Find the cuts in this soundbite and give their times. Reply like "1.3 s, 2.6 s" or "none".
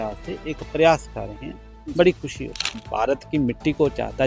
2.8 s